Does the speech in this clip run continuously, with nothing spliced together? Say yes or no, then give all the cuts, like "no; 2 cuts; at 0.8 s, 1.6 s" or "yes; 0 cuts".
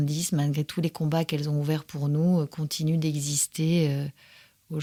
yes; 0 cuts